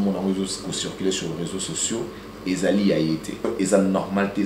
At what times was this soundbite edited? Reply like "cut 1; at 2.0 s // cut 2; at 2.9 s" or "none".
cut 1; at 3.5 s